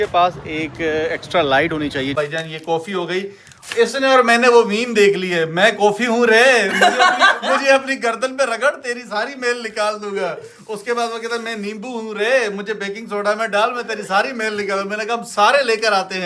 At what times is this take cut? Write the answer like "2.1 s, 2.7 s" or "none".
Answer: 2.1 s